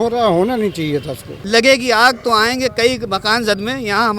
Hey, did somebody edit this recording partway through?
yes; 1 cut; at 1.4 s

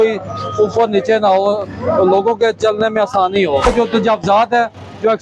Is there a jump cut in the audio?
yes; 1 cut; at 3.6 s

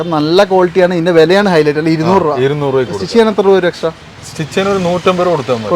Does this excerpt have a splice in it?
no; 0 cuts

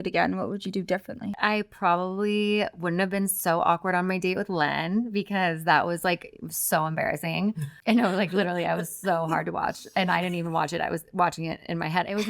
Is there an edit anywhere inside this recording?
yes; 2 cuts; at 1.3 s, 7.7 s

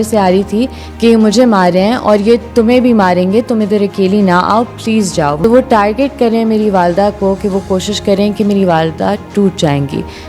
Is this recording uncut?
no; 1 cut; at 5.4 s

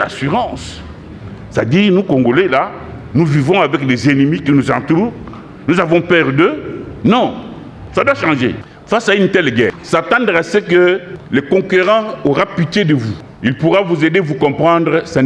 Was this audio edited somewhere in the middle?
yes; 4 cuts; at 8.7 s, 9.8 s, 11.1 s, 13.2 s

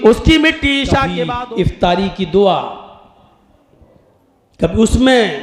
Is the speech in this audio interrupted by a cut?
yes; 1 cut; at 1.2 s

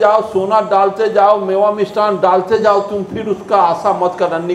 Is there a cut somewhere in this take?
no; 0 cuts

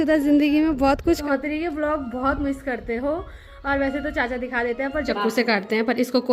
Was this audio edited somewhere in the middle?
yes; 2 cuts; at 1.2 s, 5.1 s

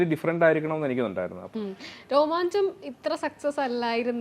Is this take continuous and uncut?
no; 1 cut; at 1.4 s

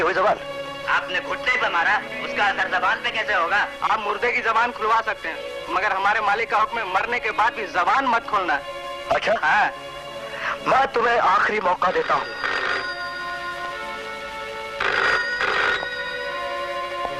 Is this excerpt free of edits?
yes; 0 cuts

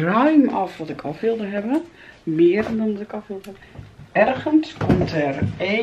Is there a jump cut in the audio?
yes; 1 cut; at 4.0 s

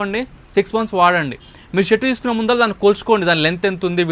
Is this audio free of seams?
yes; 0 cuts

